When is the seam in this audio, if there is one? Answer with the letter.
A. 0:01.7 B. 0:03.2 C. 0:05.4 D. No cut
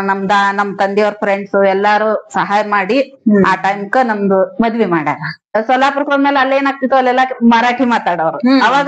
C